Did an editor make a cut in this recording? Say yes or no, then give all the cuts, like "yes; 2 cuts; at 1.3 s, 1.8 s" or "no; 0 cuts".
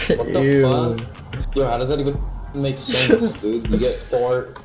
no; 0 cuts